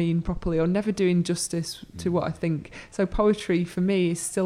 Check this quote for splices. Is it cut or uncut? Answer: uncut